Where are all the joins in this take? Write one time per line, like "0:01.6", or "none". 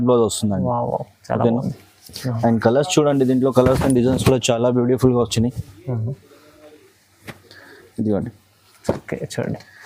none

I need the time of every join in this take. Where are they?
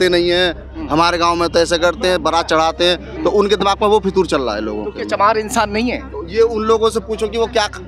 none

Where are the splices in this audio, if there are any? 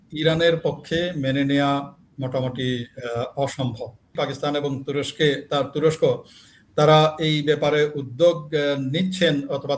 0:04.1

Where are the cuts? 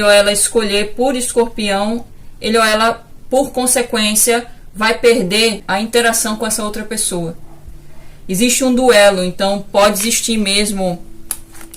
0:05.6

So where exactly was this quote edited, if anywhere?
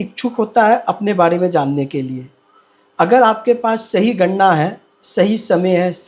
none

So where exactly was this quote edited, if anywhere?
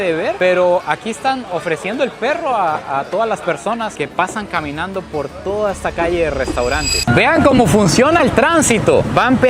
0:06.9

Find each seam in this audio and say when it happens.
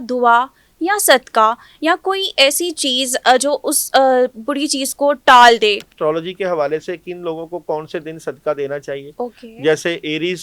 0:05.9

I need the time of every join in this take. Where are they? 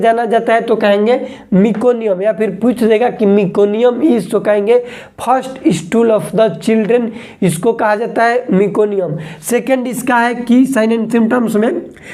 none

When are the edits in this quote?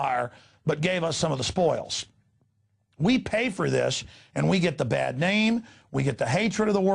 0:03.2

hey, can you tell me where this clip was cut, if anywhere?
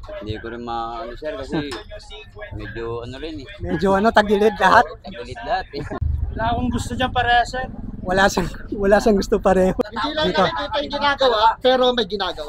0:06.0
0:09.9

